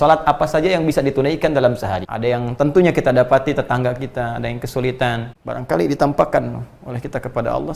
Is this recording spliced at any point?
yes; 2 cuts; at 2.0 s, 5.3 s

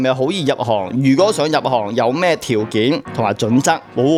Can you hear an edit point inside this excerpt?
no; 0 cuts

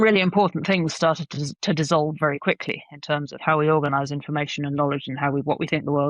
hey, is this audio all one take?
no; 1 cut; at 3.4 s

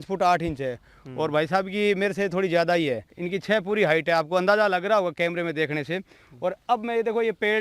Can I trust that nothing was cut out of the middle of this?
no; 1 cut; at 3.1 s

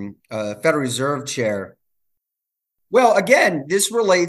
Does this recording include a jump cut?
yes; 1 cut; at 2.5 s

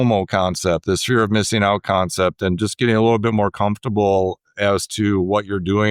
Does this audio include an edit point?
no; 0 cuts

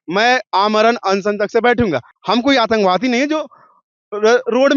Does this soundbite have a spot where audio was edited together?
yes; 1 cut; at 2.1 s

